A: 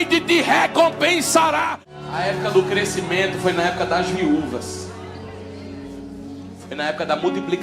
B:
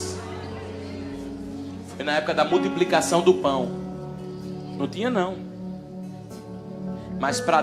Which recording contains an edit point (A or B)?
A